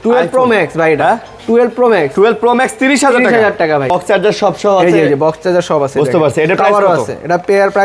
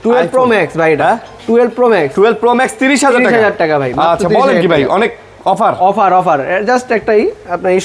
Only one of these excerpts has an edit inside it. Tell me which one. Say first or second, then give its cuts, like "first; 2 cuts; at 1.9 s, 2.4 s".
first; 1 cut; at 3.9 s